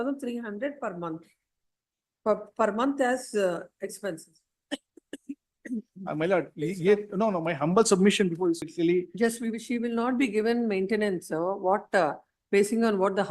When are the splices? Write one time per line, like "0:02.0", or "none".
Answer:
0:08.6